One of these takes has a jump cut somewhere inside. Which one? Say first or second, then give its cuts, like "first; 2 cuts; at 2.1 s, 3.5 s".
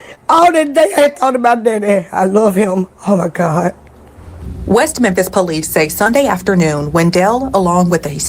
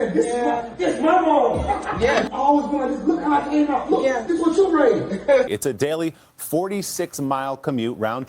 second; 2 cuts; at 2.2 s, 5.5 s